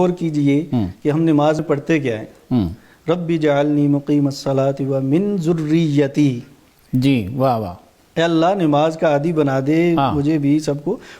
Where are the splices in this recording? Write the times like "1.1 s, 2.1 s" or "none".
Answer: 1.6 s